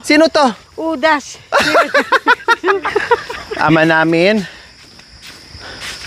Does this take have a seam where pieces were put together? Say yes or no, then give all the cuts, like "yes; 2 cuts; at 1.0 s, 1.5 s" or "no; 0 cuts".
yes; 1 cut; at 2.8 s